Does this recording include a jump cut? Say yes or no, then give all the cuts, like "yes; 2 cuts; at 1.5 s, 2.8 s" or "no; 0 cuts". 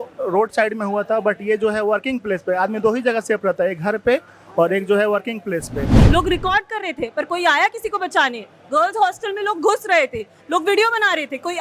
yes; 1 cut; at 5.9 s